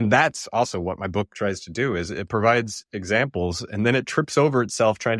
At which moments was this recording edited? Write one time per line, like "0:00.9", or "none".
0:01.3